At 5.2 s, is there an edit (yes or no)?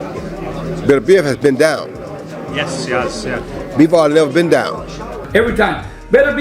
yes